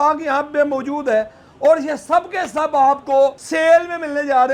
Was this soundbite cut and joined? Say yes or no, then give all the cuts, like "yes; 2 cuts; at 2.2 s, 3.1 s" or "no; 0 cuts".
yes; 1 cut; at 3.4 s